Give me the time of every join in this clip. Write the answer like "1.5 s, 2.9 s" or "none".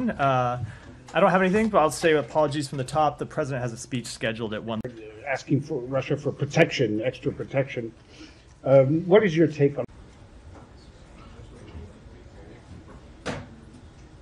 none